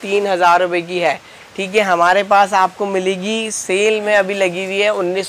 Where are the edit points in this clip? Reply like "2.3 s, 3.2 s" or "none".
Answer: none